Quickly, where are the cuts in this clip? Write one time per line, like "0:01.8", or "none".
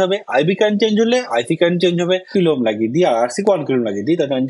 0:02.3

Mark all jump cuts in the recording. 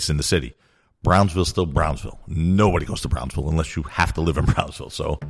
none

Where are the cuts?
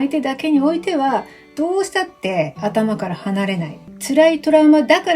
0:03.9

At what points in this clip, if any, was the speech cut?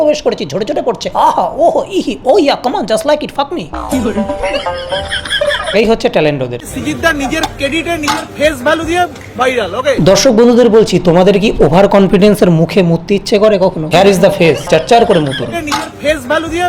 0:05.7
0:06.6
0:13.8
0:15.5

